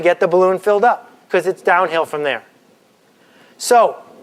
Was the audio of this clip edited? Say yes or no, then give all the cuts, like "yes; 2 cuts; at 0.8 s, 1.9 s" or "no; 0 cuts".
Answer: no; 0 cuts